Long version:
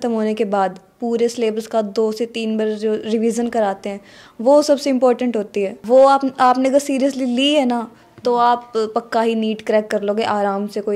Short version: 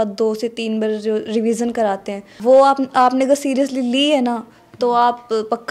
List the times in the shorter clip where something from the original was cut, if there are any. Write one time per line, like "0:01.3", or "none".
0:02.3